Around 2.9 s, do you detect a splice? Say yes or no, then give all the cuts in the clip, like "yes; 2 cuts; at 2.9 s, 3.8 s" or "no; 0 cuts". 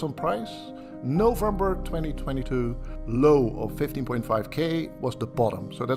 yes; 1 cut; at 2.9 s